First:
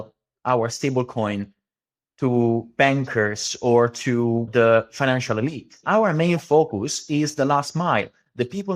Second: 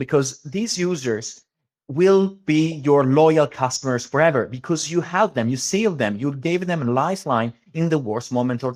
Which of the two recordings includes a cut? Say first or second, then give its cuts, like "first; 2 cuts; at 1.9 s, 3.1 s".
first; 2 cuts; at 4.5 s, 5.8 s